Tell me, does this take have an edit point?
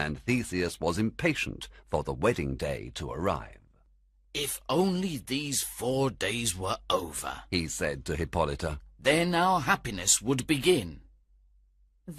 no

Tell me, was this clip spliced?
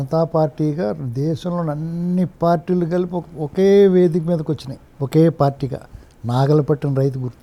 no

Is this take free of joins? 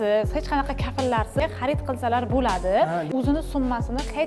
no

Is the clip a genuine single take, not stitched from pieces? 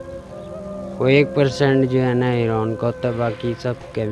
yes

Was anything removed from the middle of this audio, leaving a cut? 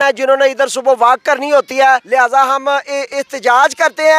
yes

